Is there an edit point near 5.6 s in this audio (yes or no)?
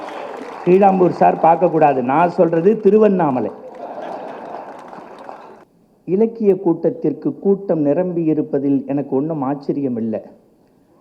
yes